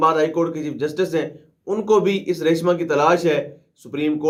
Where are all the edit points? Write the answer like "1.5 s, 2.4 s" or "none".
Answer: none